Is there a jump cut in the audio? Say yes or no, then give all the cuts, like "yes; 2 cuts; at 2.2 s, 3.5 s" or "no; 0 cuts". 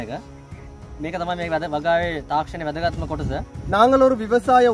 yes; 1 cut; at 3.5 s